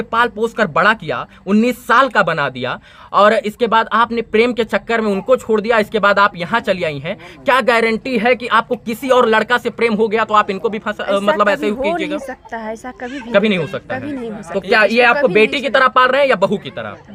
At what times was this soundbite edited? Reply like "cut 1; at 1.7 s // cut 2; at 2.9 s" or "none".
none